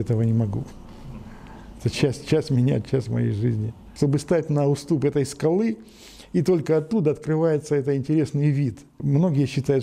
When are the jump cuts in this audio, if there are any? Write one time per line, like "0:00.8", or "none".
0:03.8
0:09.0

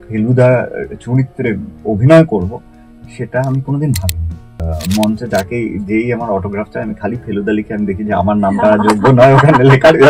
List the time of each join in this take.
0:04.7

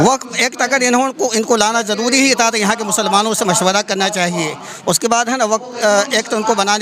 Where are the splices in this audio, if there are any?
none

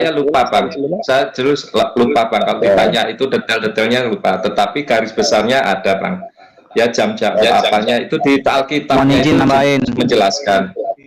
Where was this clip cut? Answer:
none

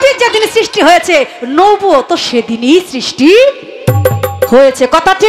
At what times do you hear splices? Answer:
none

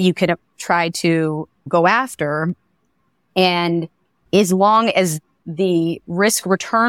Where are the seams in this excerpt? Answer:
0:01.6
0:05.4

